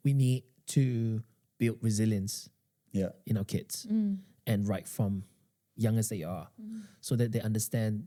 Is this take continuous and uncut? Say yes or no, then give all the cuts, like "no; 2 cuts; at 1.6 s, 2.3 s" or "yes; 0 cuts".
yes; 0 cuts